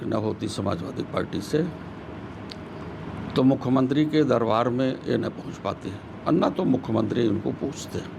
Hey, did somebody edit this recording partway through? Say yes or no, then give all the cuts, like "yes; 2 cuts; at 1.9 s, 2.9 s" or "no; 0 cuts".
no; 0 cuts